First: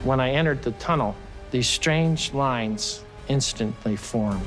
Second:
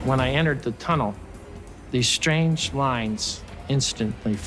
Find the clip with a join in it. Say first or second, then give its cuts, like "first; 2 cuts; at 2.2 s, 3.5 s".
first; 1 cut; at 1.3 s